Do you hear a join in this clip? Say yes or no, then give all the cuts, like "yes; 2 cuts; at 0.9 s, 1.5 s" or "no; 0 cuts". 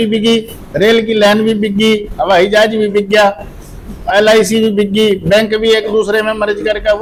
no; 0 cuts